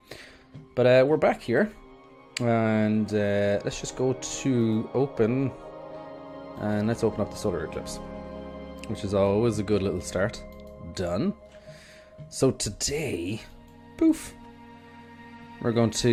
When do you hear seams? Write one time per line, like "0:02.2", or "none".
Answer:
none